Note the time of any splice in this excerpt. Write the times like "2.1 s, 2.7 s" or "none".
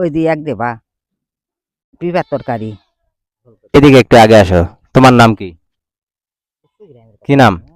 3.7 s

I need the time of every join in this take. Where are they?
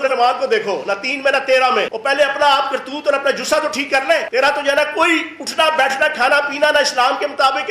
1.9 s, 4.3 s

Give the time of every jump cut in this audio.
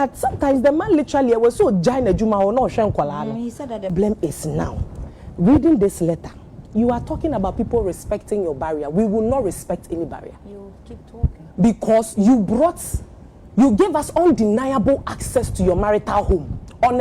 3.9 s

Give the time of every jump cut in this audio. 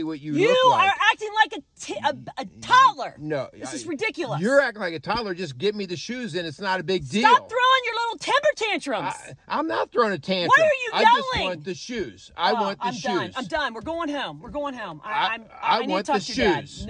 none

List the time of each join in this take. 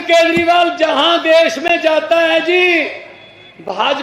none

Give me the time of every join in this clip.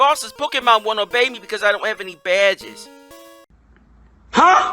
3.5 s

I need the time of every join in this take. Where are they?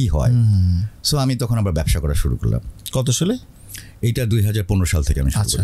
none

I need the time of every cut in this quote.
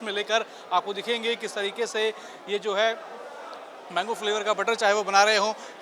none

